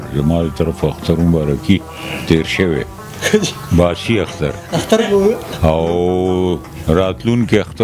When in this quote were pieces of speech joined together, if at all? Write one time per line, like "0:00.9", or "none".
none